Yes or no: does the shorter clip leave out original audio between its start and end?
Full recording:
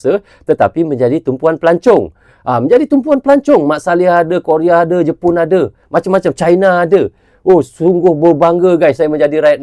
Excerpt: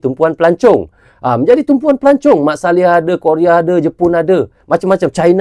no